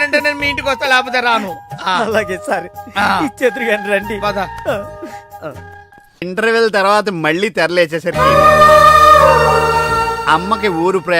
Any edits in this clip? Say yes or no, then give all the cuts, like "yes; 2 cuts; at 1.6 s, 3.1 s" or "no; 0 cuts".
yes; 1 cut; at 6.2 s